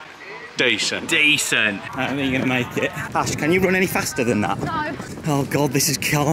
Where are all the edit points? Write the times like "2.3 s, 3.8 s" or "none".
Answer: 1.9 s, 3.0 s, 5.1 s